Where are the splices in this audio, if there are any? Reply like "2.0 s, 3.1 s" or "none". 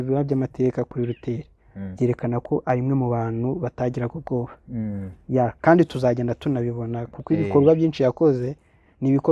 none